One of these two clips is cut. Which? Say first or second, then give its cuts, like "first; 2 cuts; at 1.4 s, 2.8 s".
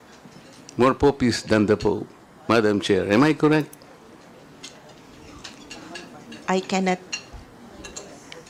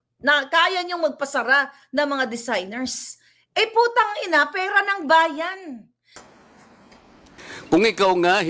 second; 1 cut; at 6.2 s